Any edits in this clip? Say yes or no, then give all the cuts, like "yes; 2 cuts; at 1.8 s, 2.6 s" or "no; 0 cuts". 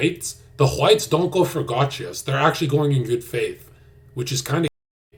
no; 0 cuts